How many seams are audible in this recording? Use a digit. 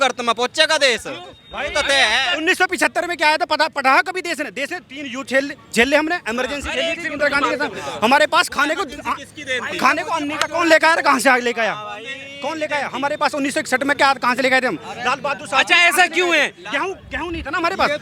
0